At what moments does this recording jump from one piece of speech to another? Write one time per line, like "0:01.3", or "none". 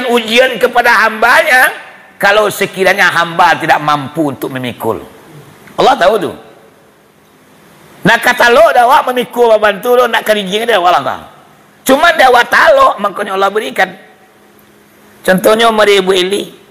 none